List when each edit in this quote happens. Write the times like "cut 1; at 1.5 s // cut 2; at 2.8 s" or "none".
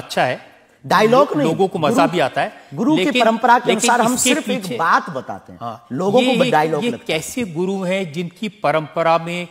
none